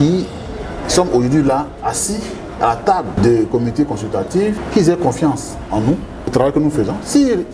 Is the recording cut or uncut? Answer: uncut